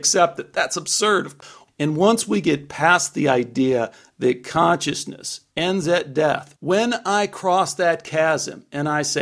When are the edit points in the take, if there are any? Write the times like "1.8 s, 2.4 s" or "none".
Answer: 1.4 s, 6.5 s